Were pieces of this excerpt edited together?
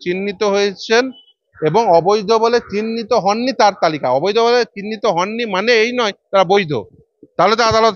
no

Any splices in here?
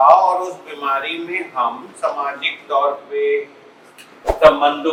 no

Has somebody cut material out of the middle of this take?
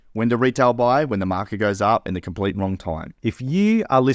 yes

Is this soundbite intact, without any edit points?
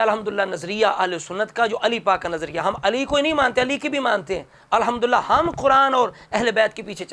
yes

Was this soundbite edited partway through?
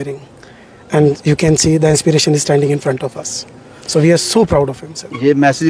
no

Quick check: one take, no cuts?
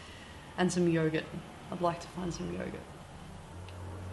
no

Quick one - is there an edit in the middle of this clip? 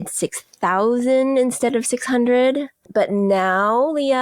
no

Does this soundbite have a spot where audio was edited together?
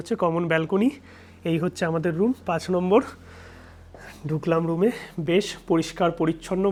no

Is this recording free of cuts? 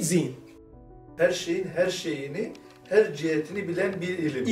no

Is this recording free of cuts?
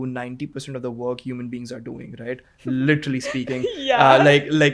yes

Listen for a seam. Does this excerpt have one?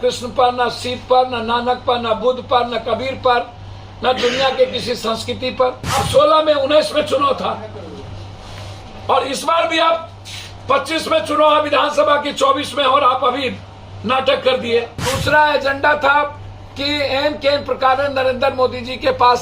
yes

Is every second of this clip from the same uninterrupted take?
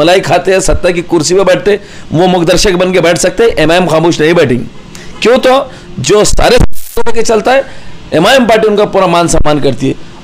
yes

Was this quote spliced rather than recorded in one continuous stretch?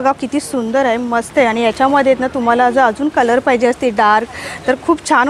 no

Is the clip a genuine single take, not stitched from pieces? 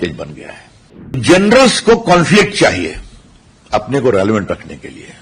no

